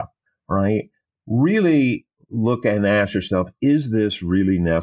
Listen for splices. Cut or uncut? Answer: uncut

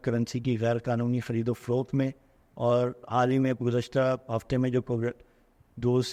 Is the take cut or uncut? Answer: uncut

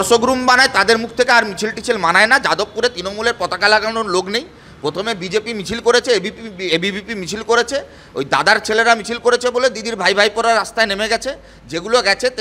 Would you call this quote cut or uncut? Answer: uncut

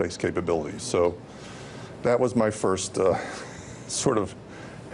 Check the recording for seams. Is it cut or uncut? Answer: uncut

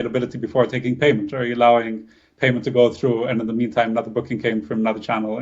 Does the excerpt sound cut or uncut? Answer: uncut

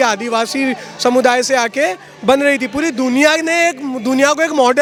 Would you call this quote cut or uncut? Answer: uncut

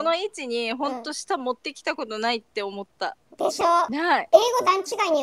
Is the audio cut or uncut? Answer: cut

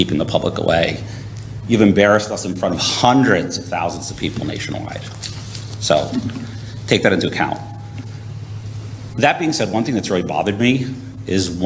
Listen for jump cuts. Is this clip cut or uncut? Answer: uncut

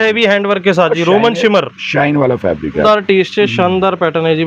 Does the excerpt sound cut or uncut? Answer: cut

